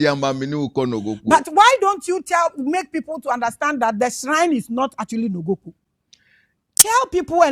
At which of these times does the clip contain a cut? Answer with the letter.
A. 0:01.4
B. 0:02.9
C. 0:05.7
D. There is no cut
D